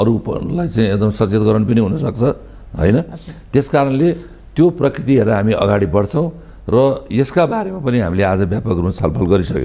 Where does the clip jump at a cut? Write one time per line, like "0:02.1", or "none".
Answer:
none